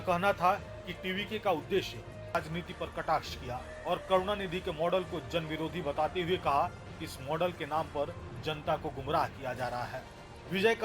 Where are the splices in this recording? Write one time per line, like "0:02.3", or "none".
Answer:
0:02.3